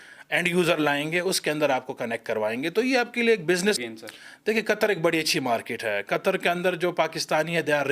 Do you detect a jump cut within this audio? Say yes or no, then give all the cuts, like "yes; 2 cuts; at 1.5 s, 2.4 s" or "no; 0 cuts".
yes; 1 cut; at 3.8 s